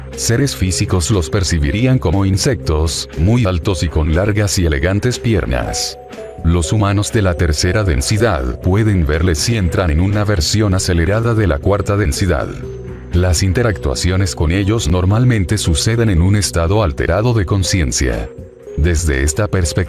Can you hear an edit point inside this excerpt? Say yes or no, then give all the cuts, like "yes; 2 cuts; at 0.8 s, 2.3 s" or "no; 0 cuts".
yes; 1 cut; at 2.3 s